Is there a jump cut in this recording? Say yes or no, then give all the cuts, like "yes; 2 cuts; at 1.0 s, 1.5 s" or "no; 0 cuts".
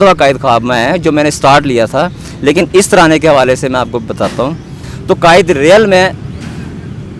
yes; 1 cut; at 4.9 s